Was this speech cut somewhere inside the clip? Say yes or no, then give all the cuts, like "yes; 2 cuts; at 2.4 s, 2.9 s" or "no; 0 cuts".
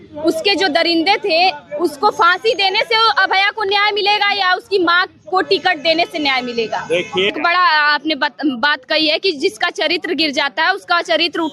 yes; 1 cut; at 7.3 s